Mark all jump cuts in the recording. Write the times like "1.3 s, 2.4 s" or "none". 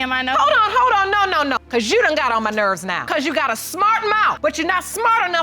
1.5 s, 3.0 s, 4.4 s

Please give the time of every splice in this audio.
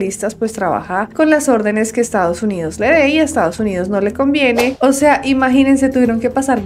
4.7 s

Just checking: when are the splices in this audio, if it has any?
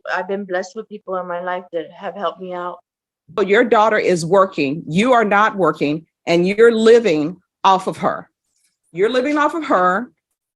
3.4 s

